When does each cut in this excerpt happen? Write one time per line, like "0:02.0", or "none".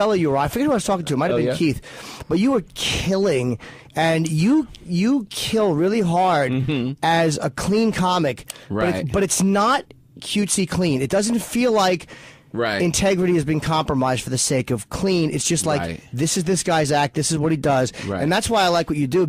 none